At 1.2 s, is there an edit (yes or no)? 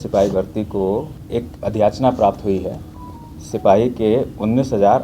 yes